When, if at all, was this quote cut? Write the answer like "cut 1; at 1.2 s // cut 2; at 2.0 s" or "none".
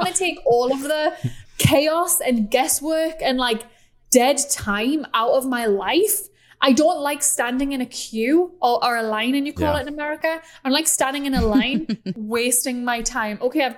cut 1; at 1.3 s